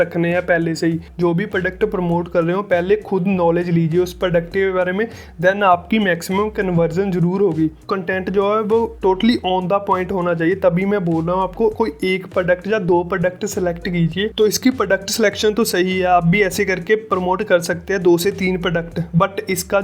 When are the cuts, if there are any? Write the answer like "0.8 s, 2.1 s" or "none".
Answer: 1.1 s, 7.9 s, 14.3 s